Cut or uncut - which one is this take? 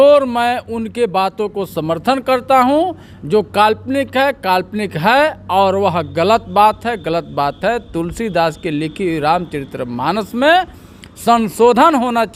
uncut